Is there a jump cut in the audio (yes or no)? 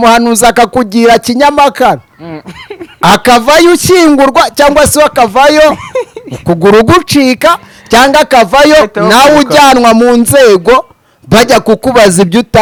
no